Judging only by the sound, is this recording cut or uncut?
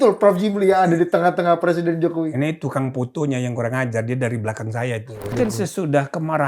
cut